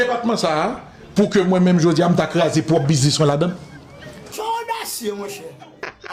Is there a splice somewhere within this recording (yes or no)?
no